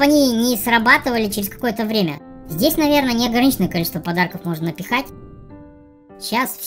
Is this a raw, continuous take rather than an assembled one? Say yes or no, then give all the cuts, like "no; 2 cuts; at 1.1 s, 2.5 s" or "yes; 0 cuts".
yes; 0 cuts